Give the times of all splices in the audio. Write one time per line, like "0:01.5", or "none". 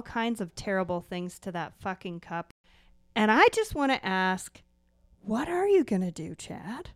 0:02.5